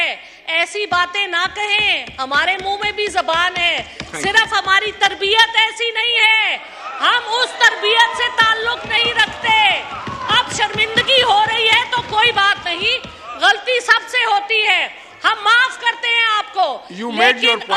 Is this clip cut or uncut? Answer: uncut